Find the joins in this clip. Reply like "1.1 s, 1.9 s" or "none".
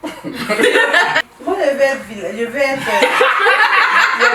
1.2 s